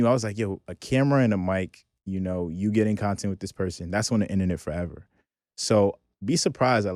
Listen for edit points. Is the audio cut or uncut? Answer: uncut